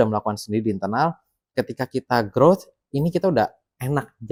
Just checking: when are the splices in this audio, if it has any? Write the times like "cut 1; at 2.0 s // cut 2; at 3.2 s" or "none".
none